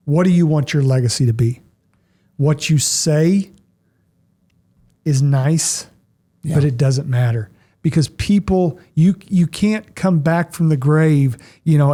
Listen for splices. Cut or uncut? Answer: uncut